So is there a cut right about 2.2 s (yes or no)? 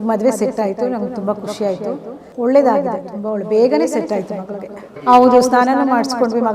yes